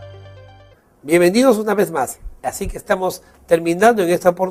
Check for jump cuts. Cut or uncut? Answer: cut